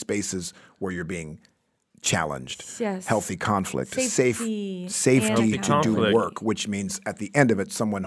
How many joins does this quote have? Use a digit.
0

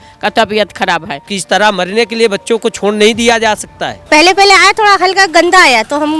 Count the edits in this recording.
2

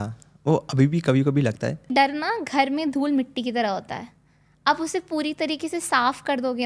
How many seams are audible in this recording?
1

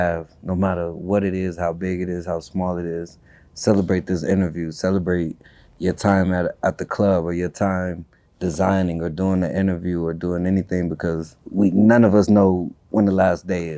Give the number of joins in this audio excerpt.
1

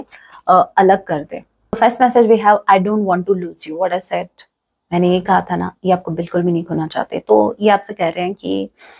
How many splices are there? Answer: 1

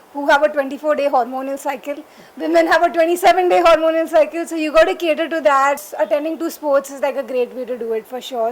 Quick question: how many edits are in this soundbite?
1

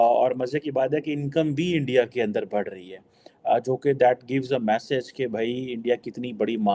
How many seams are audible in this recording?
0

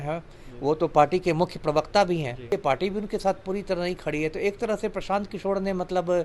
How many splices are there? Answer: 1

